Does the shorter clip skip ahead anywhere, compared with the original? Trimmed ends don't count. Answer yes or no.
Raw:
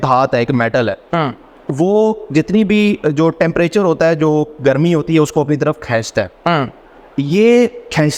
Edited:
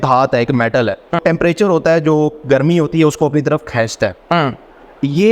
yes